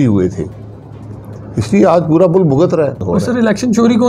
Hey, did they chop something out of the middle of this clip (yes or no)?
yes